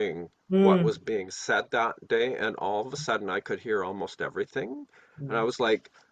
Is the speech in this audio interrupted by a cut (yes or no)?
no